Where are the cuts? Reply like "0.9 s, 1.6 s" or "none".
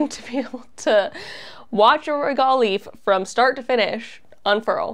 none